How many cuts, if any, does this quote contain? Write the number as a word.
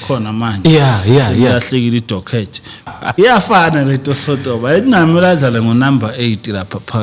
one